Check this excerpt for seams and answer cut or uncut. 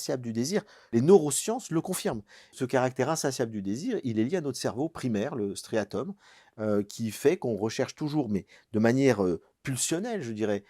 cut